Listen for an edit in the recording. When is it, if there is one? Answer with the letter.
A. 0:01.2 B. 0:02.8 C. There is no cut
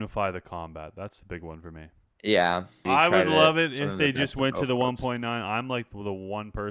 B